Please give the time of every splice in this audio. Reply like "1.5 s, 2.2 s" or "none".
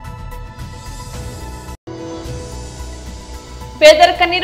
1.8 s